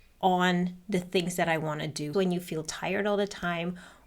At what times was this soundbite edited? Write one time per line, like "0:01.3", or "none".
0:02.1